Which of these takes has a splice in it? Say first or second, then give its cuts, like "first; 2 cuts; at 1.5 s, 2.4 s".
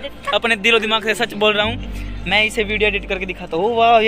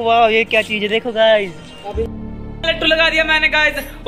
second; 1 cut; at 2.2 s